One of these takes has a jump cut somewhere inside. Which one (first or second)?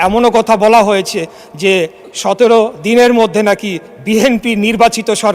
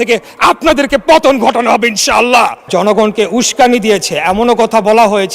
second